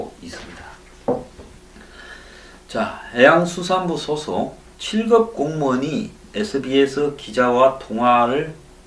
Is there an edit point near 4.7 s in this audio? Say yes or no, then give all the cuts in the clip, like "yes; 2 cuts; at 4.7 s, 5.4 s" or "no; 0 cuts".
yes; 1 cut; at 4.7 s